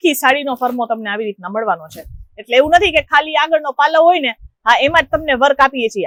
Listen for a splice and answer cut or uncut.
uncut